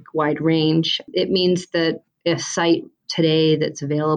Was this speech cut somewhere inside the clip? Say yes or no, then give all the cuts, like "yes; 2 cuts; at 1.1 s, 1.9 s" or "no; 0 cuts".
yes; 1 cut; at 2.1 s